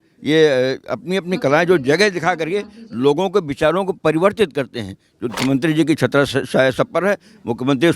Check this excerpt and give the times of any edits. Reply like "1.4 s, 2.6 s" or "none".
5.3 s